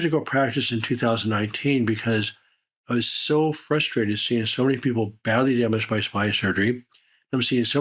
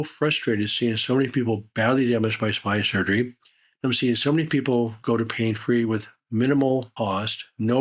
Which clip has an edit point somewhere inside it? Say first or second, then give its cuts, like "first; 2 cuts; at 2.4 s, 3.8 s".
second; 1 cut; at 6.9 s